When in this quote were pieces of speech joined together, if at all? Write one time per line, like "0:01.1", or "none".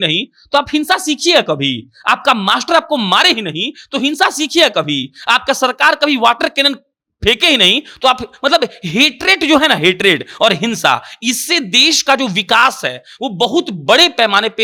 none